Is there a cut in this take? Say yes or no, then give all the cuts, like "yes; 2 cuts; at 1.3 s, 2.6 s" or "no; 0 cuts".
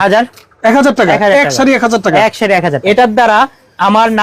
yes; 1 cut; at 2.8 s